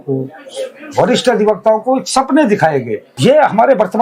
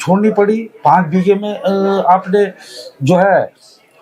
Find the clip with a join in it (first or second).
first